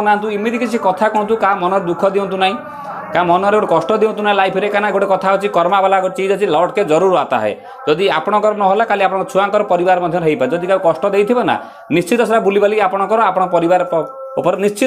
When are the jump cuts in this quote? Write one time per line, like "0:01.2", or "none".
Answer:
none